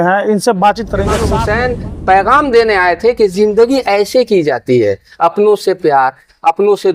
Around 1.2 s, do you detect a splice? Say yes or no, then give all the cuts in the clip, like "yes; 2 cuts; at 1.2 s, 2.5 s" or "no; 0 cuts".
yes; 1 cut; at 1.2 s